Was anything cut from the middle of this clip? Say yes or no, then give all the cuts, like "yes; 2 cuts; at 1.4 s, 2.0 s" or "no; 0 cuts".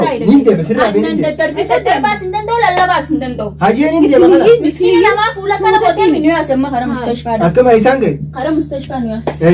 no; 0 cuts